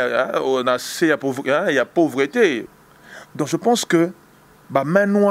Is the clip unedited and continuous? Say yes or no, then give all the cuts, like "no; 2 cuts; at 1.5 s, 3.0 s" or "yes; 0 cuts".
no; 1 cut; at 2.7 s